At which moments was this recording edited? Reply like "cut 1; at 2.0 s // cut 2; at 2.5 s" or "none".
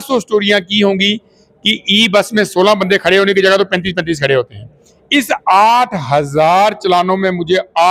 none